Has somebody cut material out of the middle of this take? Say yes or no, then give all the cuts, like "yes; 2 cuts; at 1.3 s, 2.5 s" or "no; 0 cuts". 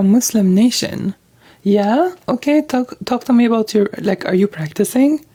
no; 0 cuts